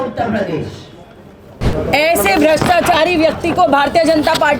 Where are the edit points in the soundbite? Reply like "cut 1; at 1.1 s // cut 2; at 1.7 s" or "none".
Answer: cut 1; at 1.7 s